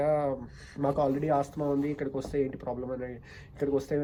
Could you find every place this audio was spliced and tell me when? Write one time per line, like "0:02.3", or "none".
none